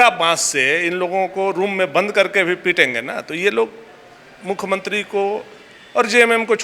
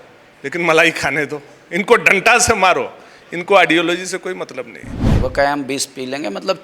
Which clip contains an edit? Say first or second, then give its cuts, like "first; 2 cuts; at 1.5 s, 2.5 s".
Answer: second; 1 cut; at 5.1 s